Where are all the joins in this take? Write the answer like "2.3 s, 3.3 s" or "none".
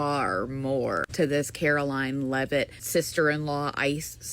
2.8 s